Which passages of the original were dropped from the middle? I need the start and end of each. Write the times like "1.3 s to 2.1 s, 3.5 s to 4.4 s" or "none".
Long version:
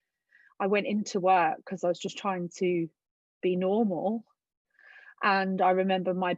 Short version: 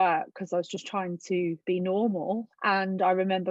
2.9 s to 3.4 s, 4.3 s to 5.1 s